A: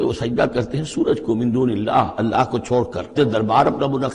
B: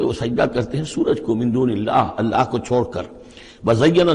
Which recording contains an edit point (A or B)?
A